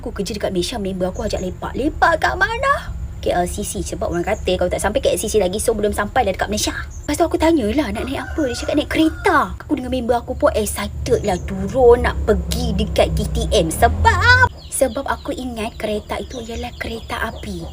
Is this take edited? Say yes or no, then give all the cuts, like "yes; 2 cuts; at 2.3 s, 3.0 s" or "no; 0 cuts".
no; 0 cuts